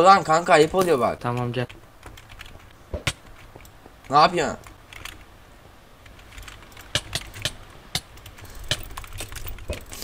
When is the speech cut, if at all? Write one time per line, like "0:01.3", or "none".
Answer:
0:01.2